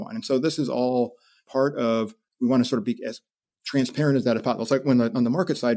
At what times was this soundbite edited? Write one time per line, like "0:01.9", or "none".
0:01.4